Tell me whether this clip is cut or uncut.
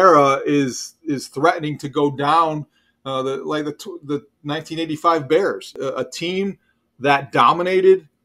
cut